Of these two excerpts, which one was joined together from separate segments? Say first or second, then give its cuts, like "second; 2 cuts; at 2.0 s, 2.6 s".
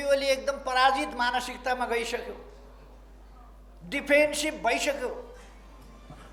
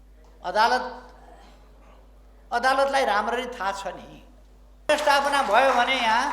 second; 1 cut; at 4.9 s